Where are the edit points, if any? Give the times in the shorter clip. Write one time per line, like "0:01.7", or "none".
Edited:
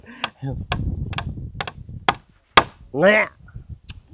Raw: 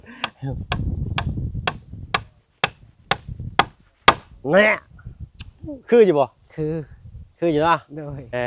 0:01.5